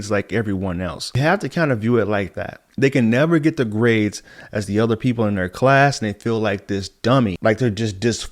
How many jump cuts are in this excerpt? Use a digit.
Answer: 2